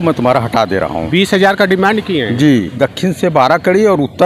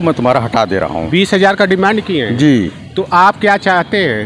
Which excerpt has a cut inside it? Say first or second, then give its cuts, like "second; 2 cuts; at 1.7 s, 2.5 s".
first; 1 cut; at 2.7 s